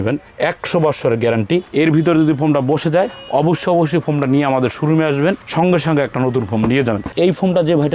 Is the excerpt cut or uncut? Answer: uncut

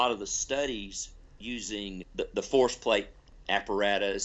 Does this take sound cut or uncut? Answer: cut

